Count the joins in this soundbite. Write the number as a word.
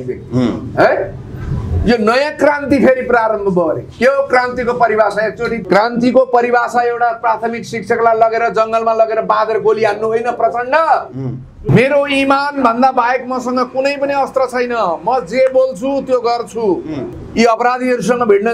three